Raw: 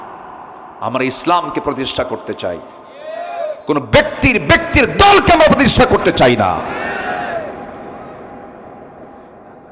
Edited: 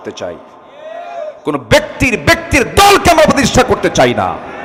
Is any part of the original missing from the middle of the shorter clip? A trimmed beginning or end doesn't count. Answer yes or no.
no